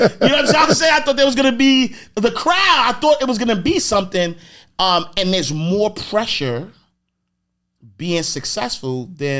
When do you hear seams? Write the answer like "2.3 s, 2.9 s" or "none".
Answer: none